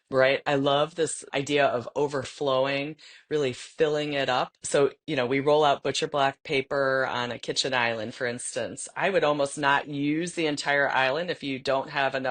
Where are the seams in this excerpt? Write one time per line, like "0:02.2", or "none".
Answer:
0:01.2
0:04.9